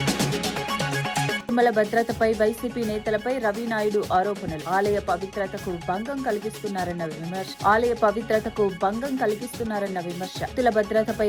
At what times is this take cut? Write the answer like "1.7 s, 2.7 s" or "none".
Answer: 1.4 s